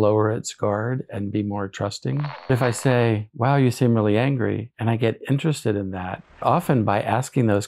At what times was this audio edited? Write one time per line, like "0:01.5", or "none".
0:02.5
0:06.4